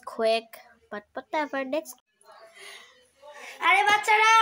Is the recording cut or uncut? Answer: cut